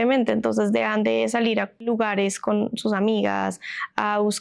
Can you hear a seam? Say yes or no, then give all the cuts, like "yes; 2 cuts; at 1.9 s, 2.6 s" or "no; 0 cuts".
yes; 1 cut; at 1.7 s